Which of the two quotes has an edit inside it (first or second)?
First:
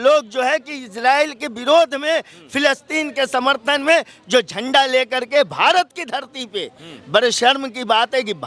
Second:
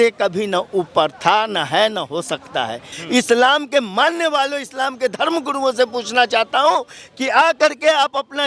second